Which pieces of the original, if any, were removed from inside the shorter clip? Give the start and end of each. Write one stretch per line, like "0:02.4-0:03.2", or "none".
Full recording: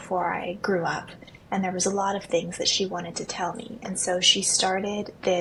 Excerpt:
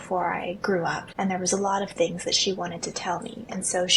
0:01.0-0:01.4